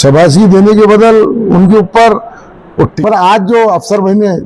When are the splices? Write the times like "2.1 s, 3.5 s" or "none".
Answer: 2.9 s